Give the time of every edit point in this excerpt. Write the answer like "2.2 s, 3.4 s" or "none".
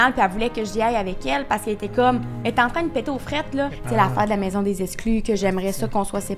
3.8 s